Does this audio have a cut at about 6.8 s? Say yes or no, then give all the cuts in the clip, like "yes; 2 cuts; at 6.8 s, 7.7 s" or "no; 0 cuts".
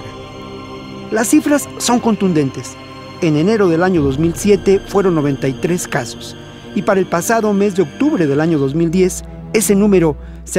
yes; 1 cut; at 6.8 s